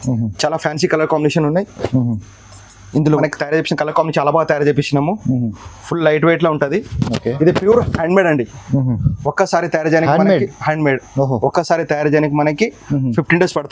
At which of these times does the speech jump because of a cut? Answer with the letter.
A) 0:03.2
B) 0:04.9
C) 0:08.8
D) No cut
A